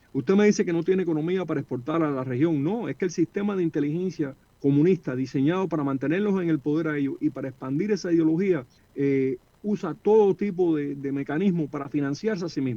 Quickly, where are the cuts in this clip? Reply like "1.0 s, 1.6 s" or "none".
4.4 s, 8.8 s